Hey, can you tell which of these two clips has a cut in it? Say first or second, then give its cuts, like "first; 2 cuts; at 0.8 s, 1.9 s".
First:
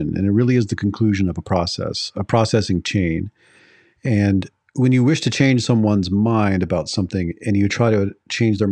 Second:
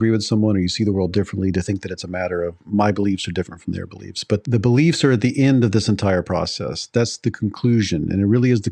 second; 1 cut; at 4.4 s